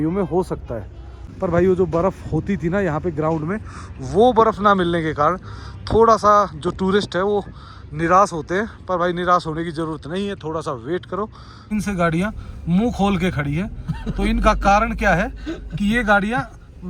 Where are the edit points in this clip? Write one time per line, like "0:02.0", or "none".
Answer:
0:01.2
0:11.5